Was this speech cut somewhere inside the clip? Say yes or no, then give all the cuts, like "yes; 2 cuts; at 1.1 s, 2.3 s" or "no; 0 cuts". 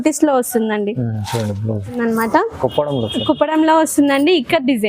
yes; 1 cut; at 2.0 s